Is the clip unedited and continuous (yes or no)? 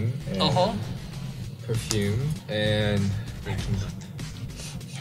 no